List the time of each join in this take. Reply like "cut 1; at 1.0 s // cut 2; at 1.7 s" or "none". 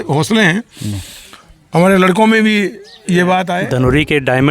cut 1; at 3.6 s